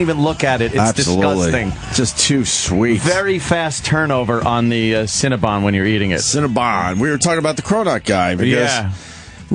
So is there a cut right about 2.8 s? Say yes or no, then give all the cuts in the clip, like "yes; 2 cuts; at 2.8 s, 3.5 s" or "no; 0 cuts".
yes; 1 cut; at 2.8 s